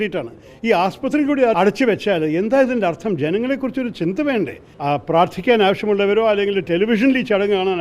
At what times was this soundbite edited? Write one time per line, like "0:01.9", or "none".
0:01.5
0:04.6